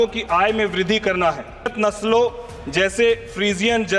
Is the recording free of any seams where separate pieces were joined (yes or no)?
no